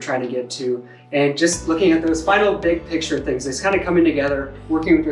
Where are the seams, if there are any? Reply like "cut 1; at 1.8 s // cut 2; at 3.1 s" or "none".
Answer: cut 1; at 0.9 s // cut 2; at 2.2 s